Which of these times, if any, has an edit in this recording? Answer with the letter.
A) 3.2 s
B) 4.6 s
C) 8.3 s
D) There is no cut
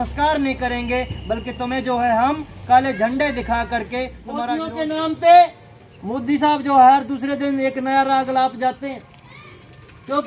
B